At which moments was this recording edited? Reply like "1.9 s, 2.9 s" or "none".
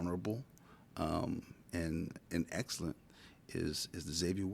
none